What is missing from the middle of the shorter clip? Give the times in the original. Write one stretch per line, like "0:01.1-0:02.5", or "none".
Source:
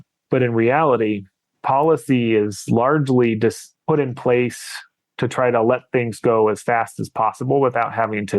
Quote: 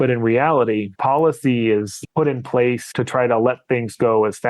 0:01.2-0:01.6
0:02.6-0:03.7
0:04.6-0:05.1